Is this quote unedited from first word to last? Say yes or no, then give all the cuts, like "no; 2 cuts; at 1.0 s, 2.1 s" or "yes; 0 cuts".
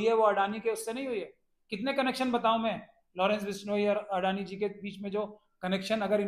yes; 0 cuts